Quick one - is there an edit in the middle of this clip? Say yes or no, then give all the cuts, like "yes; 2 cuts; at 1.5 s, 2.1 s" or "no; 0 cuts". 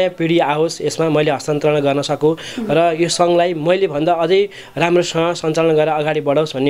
no; 0 cuts